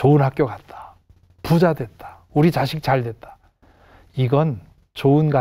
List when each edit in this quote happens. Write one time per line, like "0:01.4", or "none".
none